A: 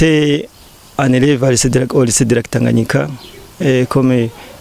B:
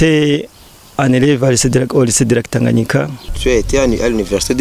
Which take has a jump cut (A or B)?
B